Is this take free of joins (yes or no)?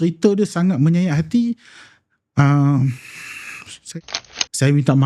no